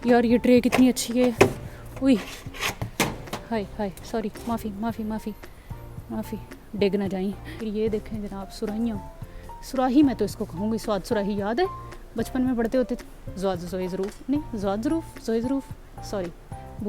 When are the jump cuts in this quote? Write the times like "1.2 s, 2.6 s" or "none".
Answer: 7.5 s, 13.0 s